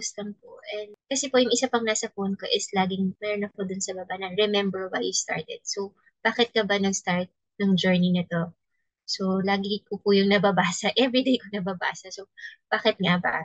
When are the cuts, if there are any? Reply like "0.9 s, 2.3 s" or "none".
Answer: 1.0 s

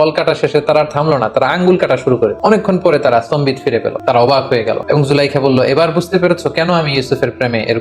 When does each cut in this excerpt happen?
2.4 s, 3.9 s, 4.8 s

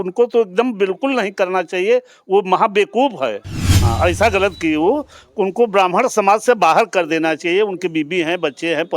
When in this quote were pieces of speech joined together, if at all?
3.5 s

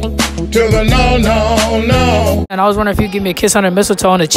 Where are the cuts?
2.5 s

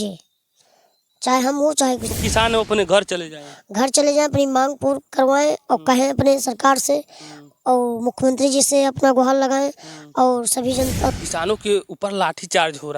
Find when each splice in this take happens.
2.1 s, 11.1 s

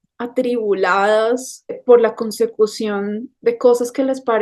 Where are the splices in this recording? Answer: 1.8 s

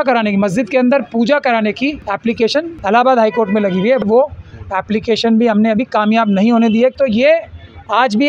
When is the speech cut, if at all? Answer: 2.3 s, 4.0 s, 6.9 s

